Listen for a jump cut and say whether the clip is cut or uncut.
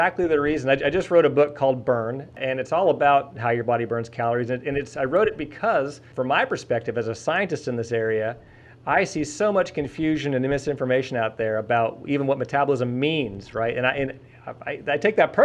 cut